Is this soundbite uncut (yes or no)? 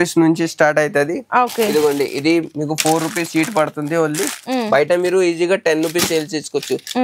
yes